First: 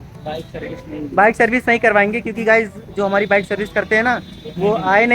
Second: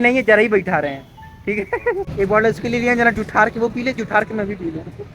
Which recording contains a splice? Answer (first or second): second